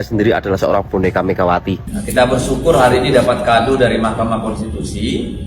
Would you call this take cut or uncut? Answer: cut